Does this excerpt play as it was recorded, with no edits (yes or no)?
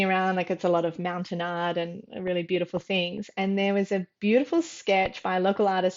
yes